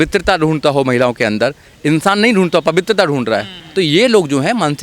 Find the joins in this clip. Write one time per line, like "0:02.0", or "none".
0:03.6

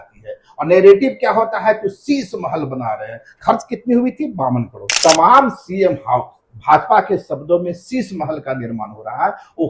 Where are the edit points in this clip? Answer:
0:05.0

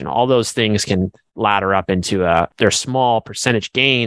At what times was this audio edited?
0:02.5

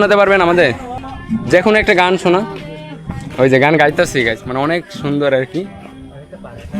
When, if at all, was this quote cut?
0:01.1

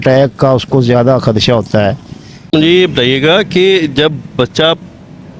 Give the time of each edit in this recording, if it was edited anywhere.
0:02.5

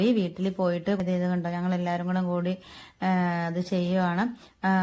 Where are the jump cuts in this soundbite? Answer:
0:01.0

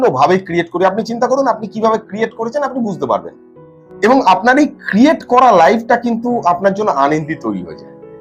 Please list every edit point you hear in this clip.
none

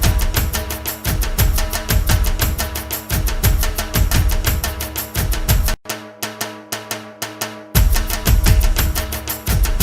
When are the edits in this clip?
0:05.8

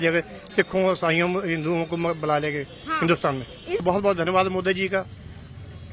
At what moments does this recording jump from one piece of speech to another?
0:03.8

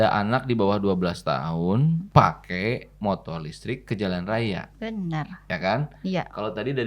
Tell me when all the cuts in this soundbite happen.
0:02.0

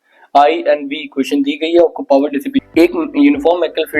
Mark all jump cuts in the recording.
0:02.7

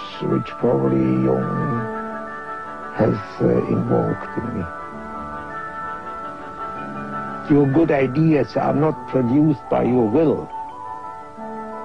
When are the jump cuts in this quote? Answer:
0:01.5

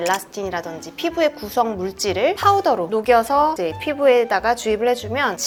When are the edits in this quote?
none

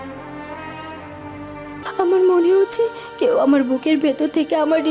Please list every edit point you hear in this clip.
0:01.8

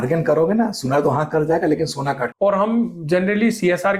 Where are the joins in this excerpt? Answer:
0:02.3

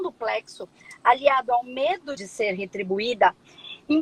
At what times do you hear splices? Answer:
0:02.2

